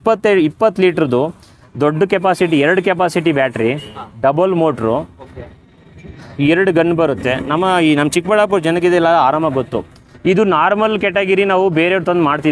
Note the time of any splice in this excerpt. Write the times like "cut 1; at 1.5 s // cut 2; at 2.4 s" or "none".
none